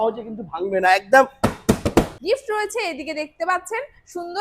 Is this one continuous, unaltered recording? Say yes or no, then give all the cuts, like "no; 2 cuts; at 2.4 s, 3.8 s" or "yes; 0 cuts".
no; 1 cut; at 2.1 s